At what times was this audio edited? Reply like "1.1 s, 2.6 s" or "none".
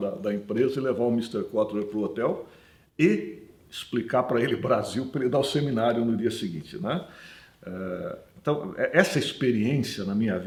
none